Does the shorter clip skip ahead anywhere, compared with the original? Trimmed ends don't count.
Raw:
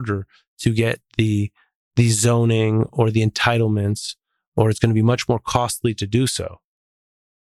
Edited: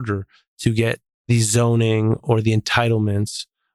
yes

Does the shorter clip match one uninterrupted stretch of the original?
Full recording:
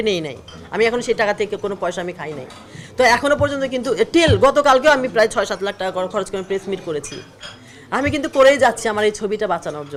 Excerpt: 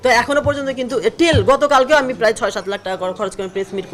yes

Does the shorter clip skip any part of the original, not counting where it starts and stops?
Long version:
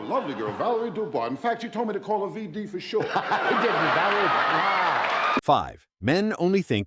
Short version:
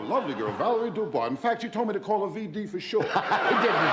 no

